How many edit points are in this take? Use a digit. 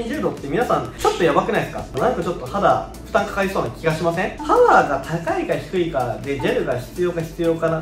3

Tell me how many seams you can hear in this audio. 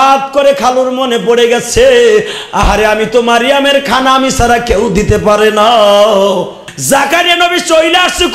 1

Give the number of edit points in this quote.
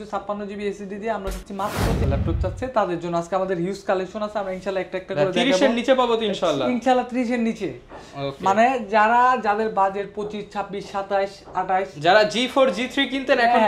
1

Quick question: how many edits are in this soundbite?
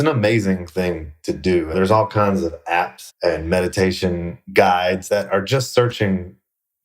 2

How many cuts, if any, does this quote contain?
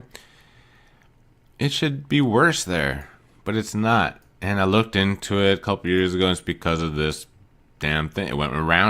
1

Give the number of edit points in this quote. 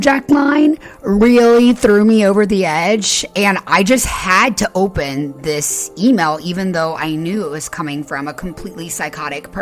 0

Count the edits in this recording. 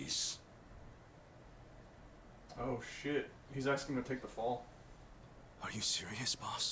0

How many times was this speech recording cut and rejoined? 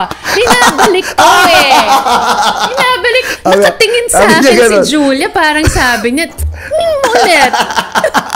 0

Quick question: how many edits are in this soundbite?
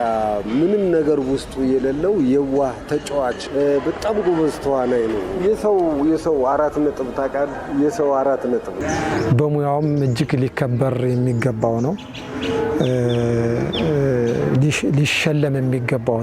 1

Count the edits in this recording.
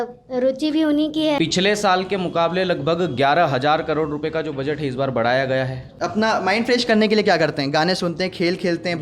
2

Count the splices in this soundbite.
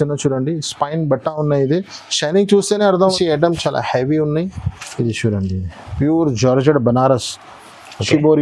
1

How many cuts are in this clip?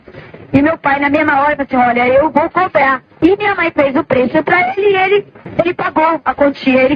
2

